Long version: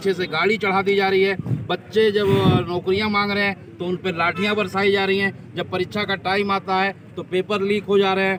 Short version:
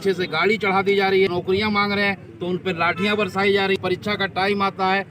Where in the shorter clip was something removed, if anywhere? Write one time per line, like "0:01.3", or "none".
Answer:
0:01.3
0:03.8